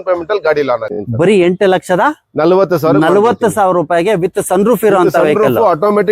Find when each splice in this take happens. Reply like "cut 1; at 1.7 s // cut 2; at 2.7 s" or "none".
cut 1; at 0.9 s